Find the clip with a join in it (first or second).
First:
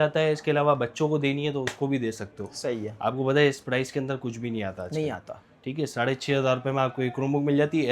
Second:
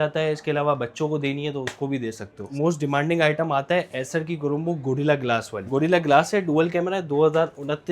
second